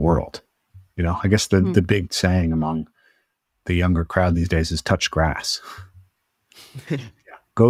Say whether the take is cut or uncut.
uncut